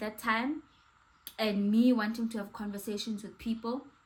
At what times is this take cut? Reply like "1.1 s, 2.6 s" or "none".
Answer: none